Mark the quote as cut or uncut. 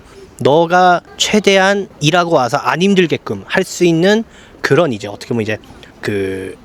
uncut